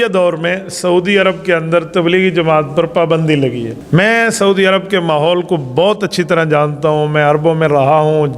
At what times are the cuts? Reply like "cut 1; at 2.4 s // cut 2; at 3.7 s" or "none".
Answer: cut 1; at 3.7 s